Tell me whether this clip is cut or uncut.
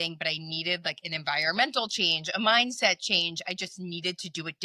uncut